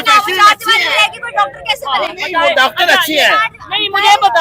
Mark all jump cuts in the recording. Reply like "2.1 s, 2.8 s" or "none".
none